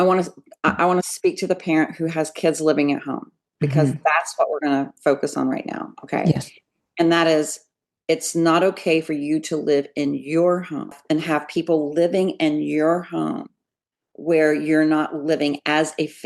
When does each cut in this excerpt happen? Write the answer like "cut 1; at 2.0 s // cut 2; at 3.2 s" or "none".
cut 1; at 11.0 s